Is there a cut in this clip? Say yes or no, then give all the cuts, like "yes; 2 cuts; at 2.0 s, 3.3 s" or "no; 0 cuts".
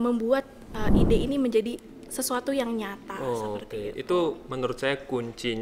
no; 0 cuts